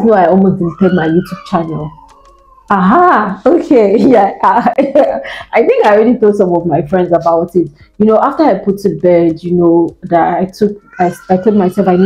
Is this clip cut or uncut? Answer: uncut